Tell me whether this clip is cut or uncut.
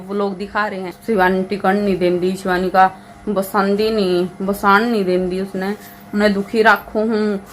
cut